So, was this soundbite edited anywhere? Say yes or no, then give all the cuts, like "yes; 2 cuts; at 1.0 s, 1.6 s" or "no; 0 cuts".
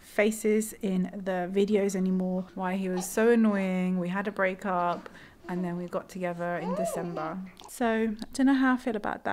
yes; 2 cuts; at 2.5 s, 7.6 s